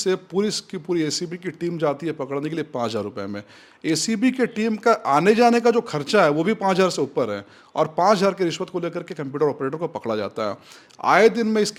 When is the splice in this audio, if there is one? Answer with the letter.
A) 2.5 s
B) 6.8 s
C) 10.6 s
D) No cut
D